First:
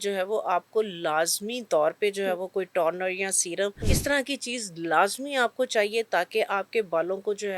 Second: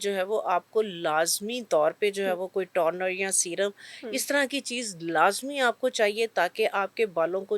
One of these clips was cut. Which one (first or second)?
first